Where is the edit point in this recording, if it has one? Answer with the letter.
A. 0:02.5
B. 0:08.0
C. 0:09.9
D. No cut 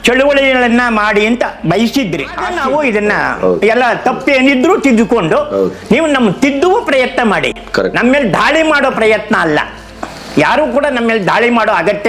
A